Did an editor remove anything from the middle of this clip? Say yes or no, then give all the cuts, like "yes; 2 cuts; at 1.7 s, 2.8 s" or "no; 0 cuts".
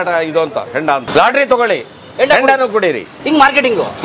yes; 2 cuts; at 1.1 s, 3.1 s